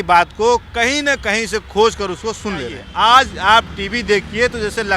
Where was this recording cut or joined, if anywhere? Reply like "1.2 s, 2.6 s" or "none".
2.8 s